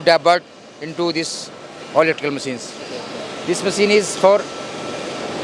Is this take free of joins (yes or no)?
yes